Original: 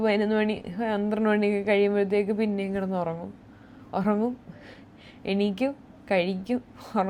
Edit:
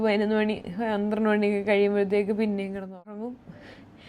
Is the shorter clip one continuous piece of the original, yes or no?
no